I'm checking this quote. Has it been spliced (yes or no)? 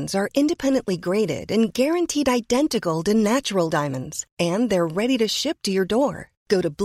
no